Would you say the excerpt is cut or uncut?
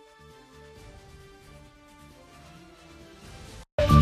cut